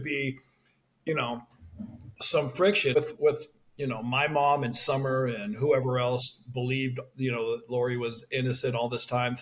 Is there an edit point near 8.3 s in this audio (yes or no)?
no